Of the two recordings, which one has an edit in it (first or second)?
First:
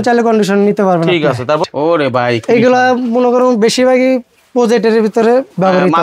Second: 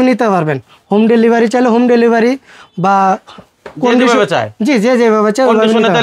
first